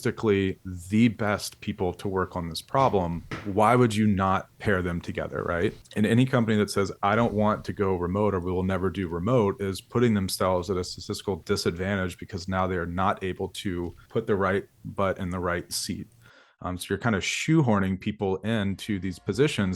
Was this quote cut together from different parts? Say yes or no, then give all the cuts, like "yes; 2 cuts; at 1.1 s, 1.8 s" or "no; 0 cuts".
yes; 4 cuts; at 3.3 s, 4.5 s, 5.8 s, 14.0 s